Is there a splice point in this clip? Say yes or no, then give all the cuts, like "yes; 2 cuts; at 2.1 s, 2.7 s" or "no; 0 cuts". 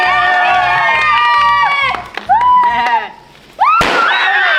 no; 0 cuts